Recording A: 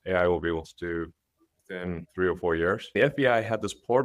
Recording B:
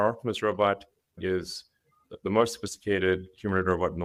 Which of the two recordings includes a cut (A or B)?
A